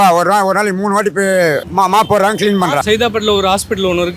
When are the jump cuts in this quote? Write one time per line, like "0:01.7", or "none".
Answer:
0:02.8